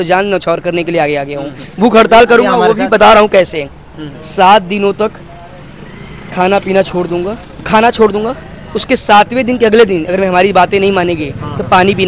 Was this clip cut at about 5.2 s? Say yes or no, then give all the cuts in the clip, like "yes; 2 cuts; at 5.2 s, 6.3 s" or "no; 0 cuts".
no; 0 cuts